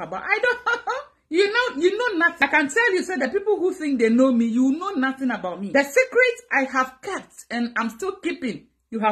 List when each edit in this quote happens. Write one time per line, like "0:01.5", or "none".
0:02.3
0:05.6